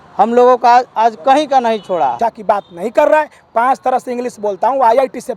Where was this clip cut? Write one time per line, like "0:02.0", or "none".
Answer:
0:02.1